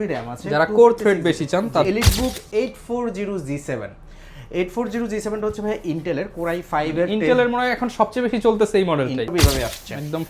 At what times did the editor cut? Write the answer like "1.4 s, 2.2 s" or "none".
1.8 s, 9.3 s

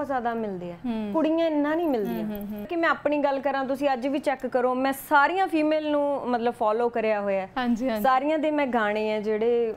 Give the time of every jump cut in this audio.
2.7 s

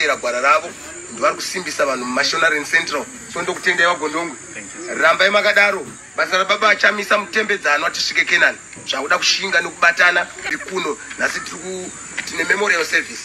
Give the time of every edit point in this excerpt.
10.4 s

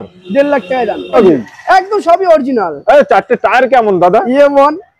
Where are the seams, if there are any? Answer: 1.1 s

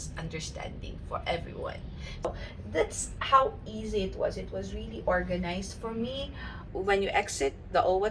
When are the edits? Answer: 2.2 s, 6.5 s

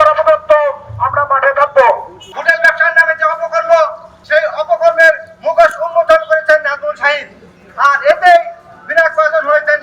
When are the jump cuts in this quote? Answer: 2.3 s, 4.1 s

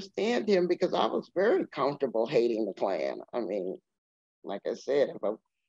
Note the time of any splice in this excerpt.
none

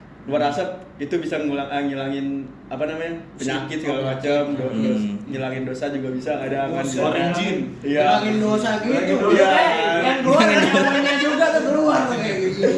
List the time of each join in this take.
none

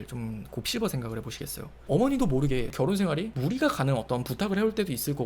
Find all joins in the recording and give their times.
1.8 s

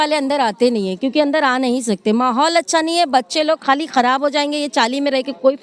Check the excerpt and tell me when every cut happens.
none

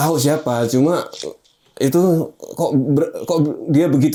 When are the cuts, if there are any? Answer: none

